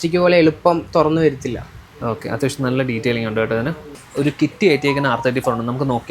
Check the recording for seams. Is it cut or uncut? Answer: cut